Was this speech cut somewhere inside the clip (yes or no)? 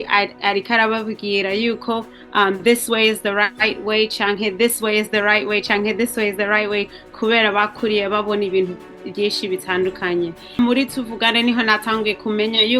yes